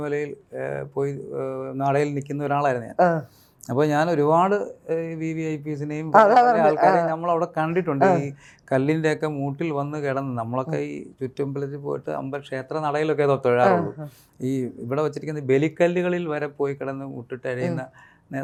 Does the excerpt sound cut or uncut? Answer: uncut